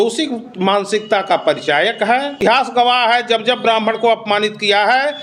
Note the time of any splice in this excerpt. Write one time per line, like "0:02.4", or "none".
0:02.3